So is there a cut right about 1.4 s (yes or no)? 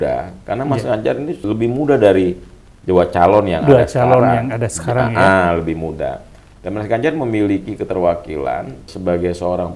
yes